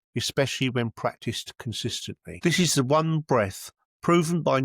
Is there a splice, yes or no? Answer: yes